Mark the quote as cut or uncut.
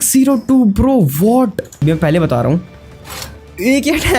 cut